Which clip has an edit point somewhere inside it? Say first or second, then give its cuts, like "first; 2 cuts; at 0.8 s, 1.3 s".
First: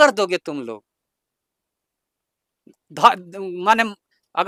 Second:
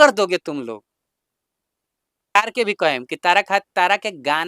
second; 1 cut; at 2.4 s